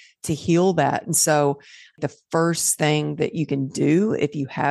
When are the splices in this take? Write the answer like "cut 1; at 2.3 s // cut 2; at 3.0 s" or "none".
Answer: cut 1; at 2.0 s